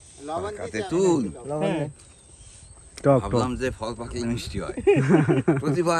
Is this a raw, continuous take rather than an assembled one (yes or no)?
yes